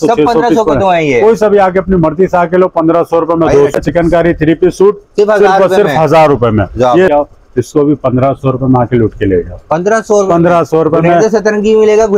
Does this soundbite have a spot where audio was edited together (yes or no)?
yes